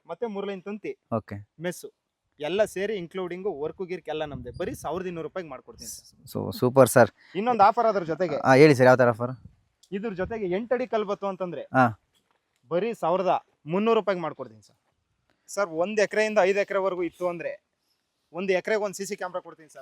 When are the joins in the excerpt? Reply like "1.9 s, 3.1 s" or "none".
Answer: 14.8 s